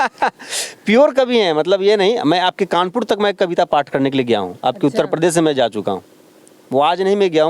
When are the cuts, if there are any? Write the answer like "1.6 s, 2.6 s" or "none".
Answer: none